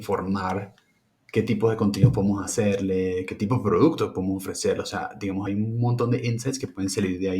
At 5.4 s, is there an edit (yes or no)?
yes